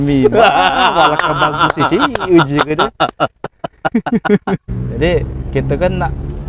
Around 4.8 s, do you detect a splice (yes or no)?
yes